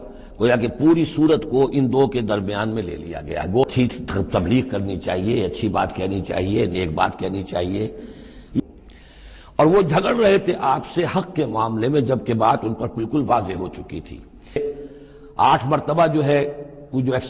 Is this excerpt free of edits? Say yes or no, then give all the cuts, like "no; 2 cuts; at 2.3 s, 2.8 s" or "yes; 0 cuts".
no; 3 cuts; at 3.6 s, 8.6 s, 14.6 s